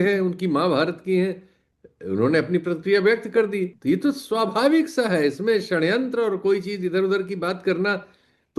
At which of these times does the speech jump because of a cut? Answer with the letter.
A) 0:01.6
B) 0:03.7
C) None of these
B